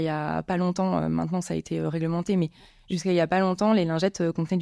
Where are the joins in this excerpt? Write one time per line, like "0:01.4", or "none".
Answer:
none